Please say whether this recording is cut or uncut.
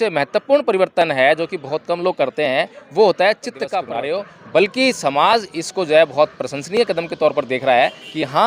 cut